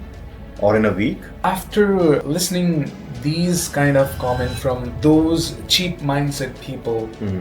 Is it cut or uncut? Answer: cut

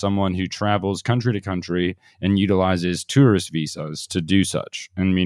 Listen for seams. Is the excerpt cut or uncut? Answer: uncut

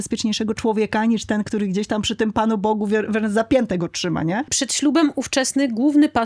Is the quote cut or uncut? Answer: cut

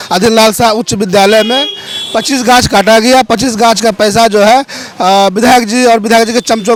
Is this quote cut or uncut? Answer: uncut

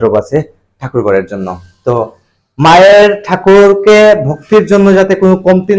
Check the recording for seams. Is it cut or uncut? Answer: uncut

